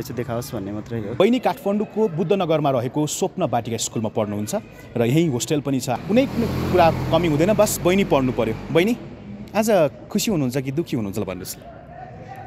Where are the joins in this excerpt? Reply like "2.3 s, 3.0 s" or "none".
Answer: 1.2 s